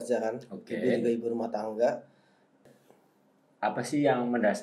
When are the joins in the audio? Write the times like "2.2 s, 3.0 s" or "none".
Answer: 2.7 s